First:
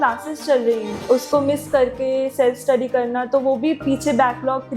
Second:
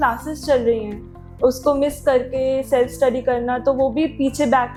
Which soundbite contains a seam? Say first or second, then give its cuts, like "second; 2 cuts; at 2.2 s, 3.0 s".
first; 1 cut; at 0.9 s